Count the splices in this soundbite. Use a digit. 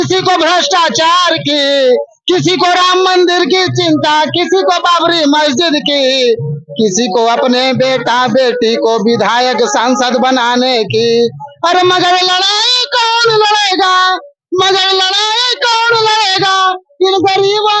0